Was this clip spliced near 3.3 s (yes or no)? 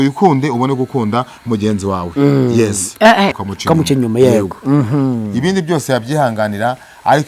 yes